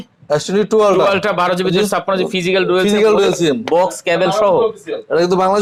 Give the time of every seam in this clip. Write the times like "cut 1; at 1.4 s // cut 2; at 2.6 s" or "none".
none